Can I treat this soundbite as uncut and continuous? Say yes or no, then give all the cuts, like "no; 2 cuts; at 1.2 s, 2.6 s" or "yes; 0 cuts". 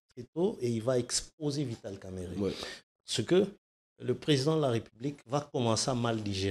yes; 0 cuts